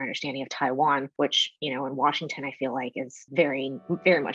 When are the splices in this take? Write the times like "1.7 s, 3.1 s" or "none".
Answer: 1.1 s, 3.2 s